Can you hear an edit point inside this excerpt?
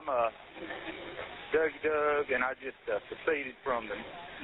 no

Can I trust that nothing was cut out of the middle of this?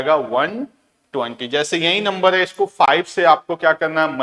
yes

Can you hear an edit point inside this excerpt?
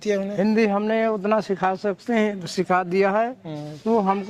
no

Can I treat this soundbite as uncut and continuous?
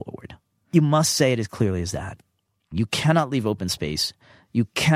no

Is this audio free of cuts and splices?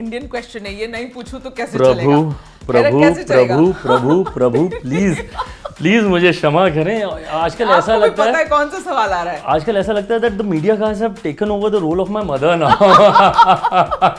yes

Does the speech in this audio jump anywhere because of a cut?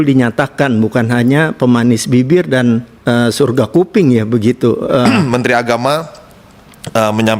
yes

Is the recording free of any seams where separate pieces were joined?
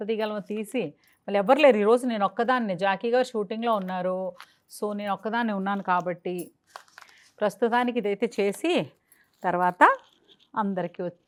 yes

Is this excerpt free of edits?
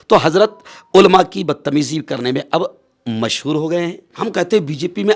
no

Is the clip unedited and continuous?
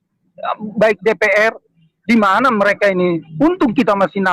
yes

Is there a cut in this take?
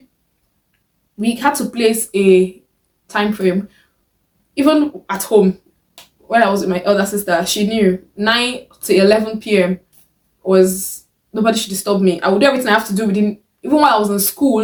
no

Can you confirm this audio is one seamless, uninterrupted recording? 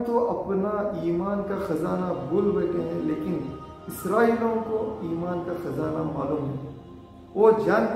yes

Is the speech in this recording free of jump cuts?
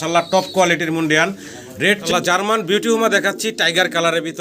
no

